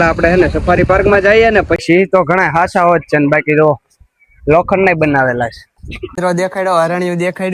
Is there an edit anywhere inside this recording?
yes; 2 cuts; at 1.7 s, 6.1 s

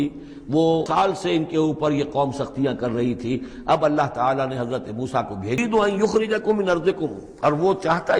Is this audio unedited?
no; 2 cuts; at 0.9 s, 5.6 s

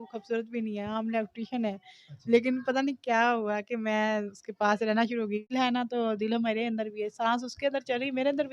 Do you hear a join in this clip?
yes; 1 cut; at 5.5 s

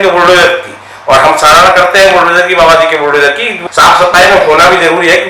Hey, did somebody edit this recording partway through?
yes; 1 cut; at 3.5 s

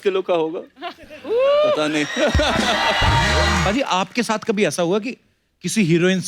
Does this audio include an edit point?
yes; 1 cut; at 3.6 s

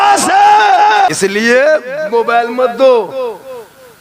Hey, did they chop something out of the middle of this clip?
yes; 1 cut; at 1.1 s

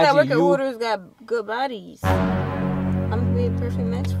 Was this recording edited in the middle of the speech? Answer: no; 0 cuts

